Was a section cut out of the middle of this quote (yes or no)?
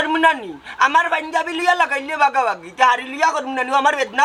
no